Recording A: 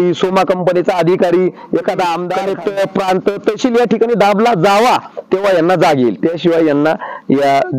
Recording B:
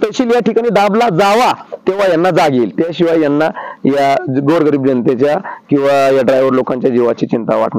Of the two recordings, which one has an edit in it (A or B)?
A